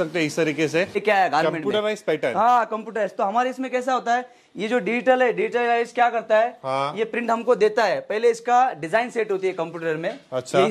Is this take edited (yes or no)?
yes